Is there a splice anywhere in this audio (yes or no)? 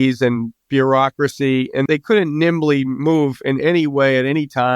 yes